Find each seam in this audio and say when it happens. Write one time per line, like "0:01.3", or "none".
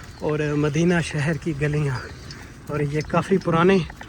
none

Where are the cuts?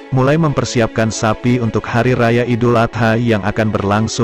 none

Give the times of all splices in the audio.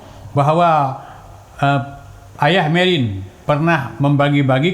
0:03.3

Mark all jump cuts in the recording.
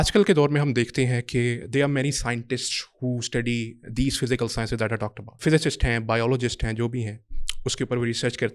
0:05.4

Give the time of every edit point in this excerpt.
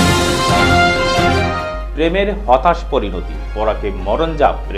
0:01.7

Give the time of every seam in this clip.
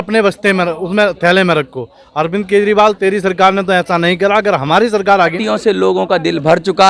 0:05.4

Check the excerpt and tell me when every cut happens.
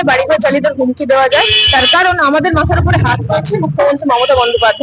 none

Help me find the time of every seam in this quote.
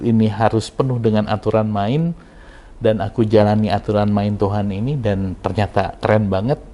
none

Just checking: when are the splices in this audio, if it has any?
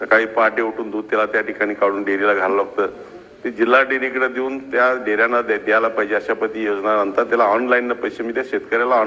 none

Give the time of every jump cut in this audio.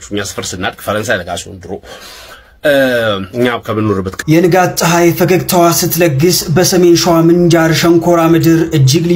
0:04.2

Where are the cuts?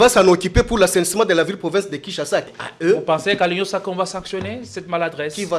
0:02.5

